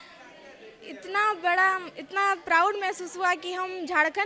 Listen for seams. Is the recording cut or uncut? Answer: uncut